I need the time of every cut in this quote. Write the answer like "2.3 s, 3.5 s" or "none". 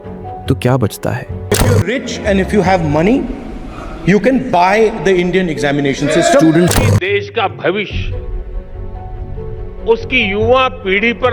1.7 s, 6.7 s